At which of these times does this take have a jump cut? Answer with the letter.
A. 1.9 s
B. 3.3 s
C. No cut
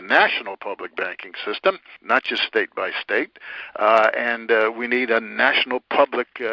A